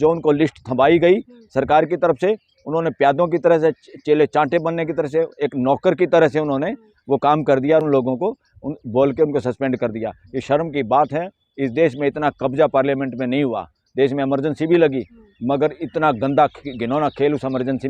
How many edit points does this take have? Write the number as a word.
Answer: zero